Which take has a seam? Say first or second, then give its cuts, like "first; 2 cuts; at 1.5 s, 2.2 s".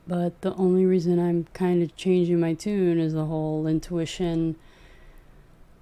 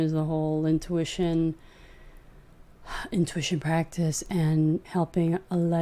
second; 1 cut; at 4.9 s